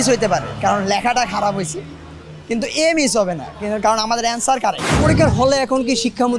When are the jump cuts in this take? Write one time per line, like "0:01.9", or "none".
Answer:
0:04.9